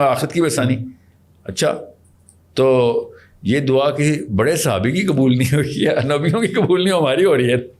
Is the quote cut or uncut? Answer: uncut